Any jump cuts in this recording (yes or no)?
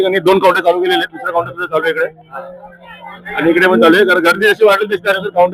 no